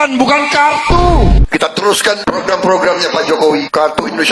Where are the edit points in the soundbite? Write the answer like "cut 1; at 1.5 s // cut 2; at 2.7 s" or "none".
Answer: cut 1; at 1.4 s